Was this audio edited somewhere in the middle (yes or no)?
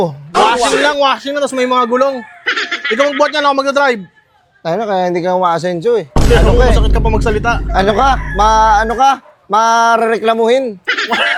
no